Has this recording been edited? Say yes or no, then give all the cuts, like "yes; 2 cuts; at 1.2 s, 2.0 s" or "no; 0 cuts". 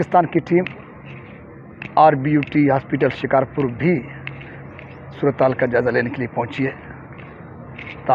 no; 0 cuts